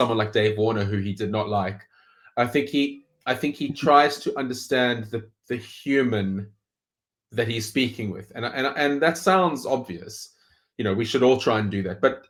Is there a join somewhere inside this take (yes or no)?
no